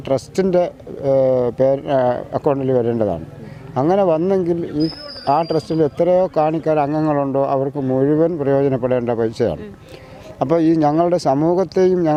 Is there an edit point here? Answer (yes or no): no